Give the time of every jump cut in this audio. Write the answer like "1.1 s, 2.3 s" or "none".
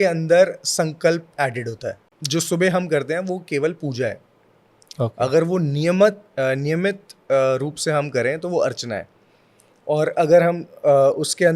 2.1 s